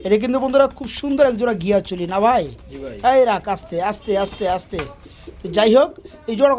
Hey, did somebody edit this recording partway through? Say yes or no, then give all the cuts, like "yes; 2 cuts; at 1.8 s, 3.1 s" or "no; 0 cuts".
no; 0 cuts